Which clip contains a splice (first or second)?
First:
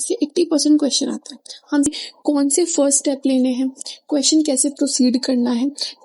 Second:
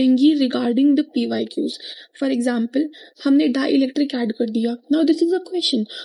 first